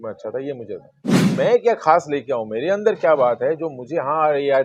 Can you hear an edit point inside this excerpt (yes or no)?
yes